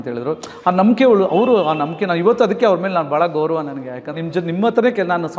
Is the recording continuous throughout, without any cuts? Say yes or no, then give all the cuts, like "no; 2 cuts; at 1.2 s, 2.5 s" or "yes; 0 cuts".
no; 1 cut; at 4.1 s